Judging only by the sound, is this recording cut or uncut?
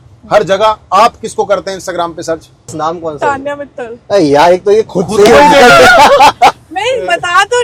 uncut